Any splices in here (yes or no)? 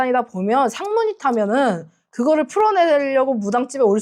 no